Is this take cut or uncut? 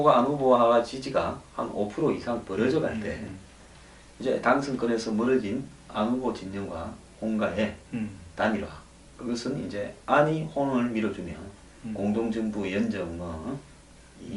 uncut